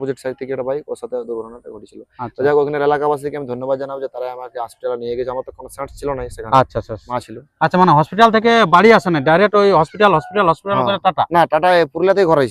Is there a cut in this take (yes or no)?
yes